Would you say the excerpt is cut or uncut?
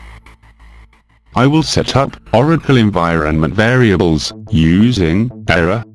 cut